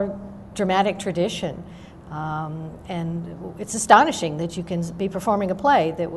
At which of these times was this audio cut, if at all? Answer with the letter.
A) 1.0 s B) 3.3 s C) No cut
B